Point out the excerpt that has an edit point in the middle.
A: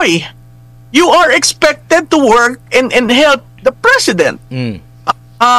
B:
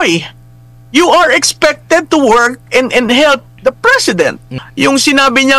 B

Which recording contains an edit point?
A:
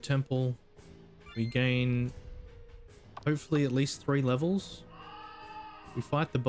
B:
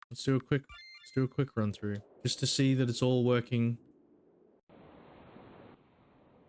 B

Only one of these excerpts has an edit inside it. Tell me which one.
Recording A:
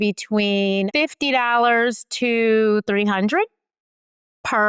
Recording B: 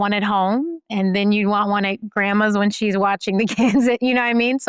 A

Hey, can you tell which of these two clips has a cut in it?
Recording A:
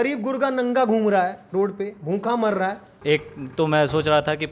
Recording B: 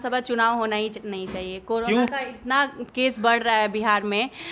A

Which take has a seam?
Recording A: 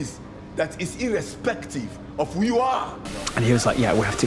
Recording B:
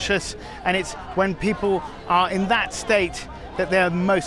A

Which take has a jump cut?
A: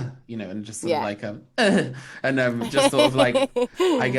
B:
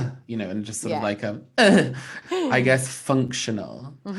B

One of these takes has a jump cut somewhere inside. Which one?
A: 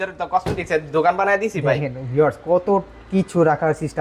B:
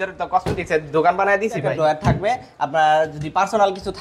B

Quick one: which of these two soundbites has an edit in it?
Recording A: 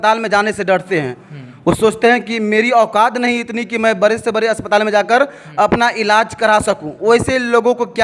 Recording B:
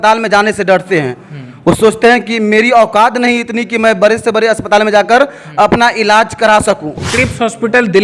B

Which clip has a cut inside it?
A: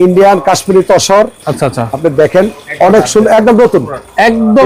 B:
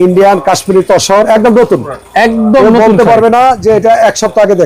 B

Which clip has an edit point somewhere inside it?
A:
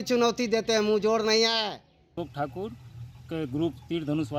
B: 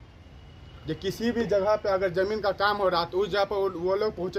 A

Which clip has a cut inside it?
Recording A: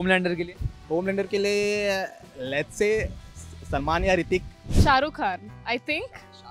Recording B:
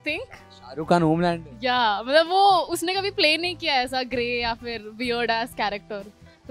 A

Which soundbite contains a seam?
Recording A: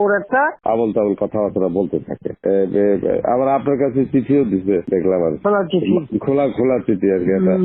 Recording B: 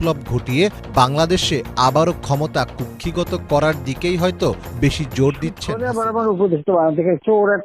B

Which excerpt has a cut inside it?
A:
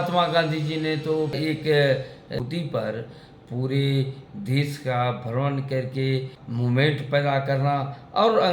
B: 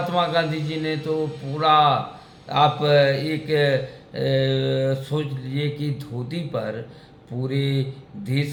A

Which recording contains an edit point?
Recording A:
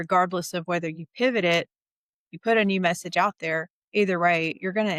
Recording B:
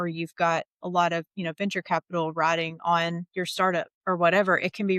B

